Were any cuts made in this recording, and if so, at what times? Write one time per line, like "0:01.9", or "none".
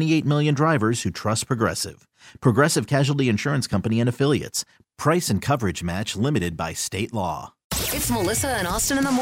0:07.7